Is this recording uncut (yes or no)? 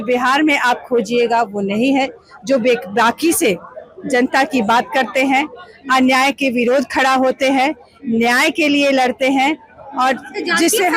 yes